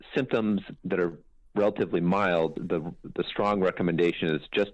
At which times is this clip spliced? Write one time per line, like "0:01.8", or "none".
0:02.5